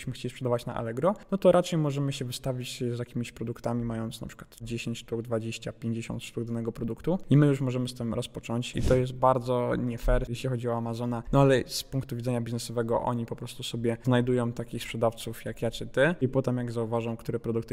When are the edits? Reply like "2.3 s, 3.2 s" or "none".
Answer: 1.2 s, 7.2 s, 8.7 s, 16.2 s